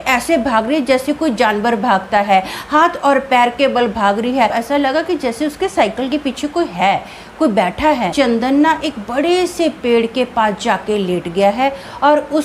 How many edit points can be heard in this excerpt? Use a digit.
2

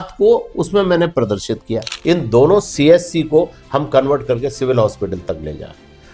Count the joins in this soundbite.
1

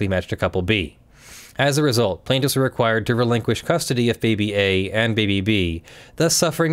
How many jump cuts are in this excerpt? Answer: 0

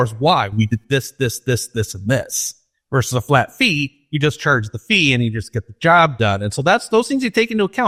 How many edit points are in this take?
0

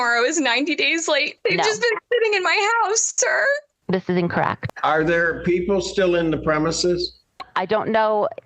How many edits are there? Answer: 2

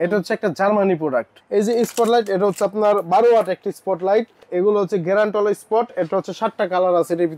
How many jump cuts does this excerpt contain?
2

